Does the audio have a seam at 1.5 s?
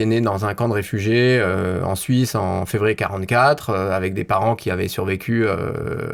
no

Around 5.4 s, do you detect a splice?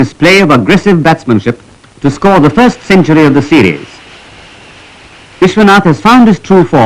yes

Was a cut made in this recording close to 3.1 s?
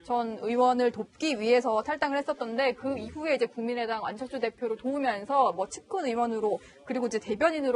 no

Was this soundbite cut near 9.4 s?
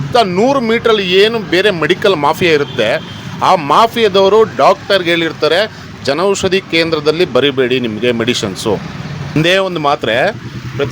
yes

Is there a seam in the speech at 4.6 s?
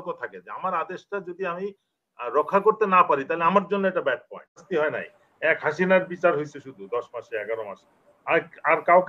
yes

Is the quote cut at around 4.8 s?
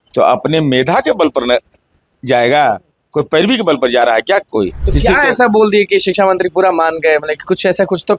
yes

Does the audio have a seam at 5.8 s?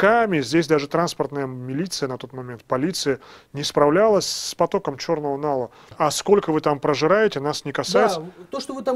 yes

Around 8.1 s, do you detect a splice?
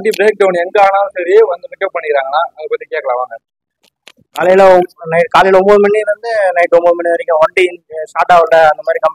no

